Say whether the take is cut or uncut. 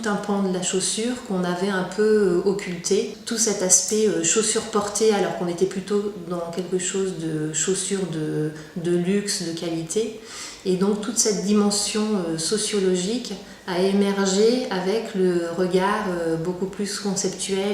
cut